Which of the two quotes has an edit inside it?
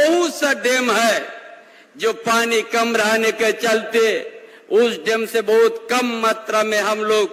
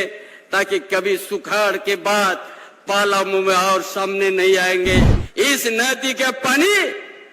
second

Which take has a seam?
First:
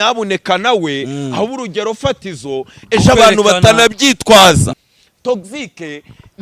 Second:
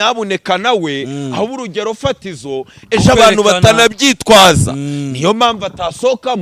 first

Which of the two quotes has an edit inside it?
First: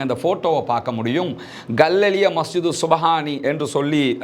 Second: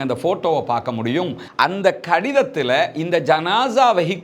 second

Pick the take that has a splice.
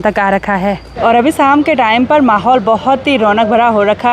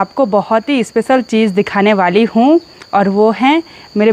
first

